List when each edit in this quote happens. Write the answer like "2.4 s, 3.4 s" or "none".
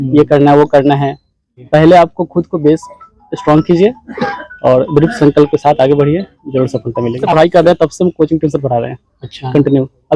1.6 s, 7.3 s

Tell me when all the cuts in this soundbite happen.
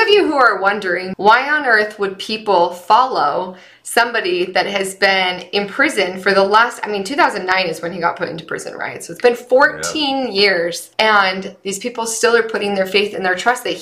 1.1 s, 10.8 s

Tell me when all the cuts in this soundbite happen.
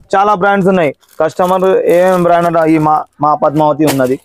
none

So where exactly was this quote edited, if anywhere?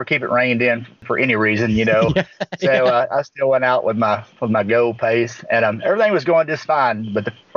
1.0 s

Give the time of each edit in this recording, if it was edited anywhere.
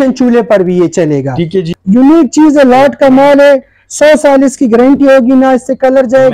1.7 s

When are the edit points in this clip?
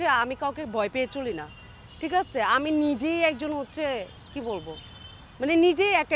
none

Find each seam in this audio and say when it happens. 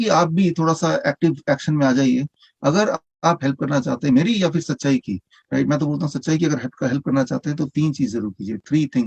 none

